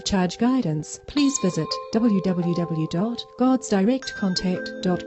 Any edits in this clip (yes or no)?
yes